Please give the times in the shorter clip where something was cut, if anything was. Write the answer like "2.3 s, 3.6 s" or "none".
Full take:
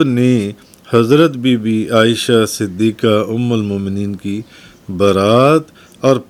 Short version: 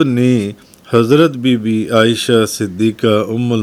none